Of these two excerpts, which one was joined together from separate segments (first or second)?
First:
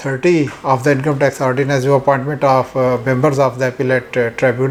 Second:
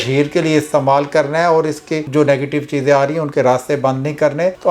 second